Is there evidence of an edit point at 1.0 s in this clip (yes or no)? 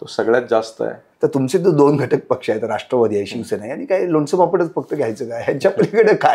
yes